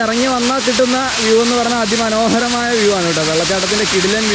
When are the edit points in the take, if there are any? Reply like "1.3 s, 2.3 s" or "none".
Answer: none